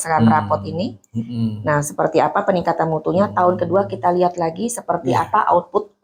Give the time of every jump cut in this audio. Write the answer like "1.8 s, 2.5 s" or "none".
none